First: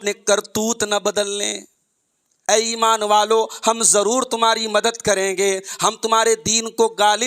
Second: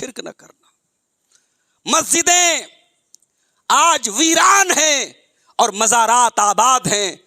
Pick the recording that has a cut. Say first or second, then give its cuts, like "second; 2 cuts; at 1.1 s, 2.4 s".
first; 1 cut; at 2.5 s